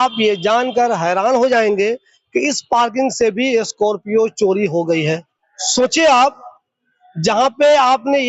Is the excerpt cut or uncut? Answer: uncut